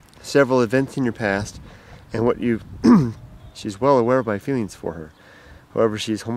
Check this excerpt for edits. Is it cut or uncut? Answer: uncut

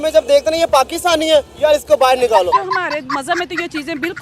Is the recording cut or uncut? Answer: cut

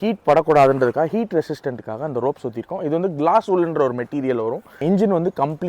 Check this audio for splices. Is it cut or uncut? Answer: cut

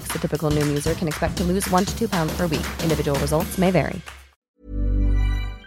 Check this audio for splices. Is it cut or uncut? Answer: cut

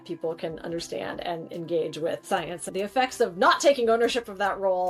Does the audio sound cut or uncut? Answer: cut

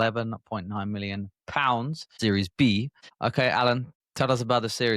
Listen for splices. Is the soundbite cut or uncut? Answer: cut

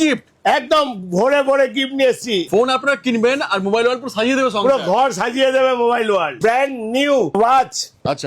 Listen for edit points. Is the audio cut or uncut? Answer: cut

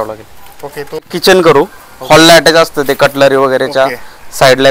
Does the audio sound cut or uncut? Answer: cut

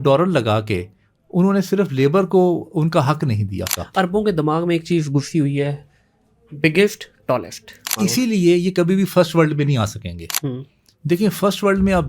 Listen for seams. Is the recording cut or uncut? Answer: cut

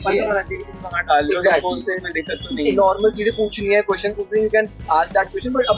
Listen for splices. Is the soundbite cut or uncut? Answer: uncut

